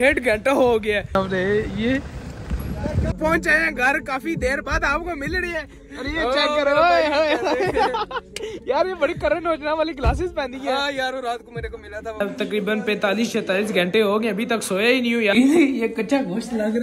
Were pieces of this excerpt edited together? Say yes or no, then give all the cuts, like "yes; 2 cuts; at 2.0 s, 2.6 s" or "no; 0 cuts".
yes; 4 cuts; at 1.1 s, 3.1 s, 12.2 s, 15.3 s